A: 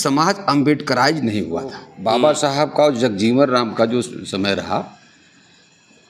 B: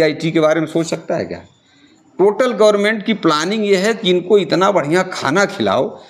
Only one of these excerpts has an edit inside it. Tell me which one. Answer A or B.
A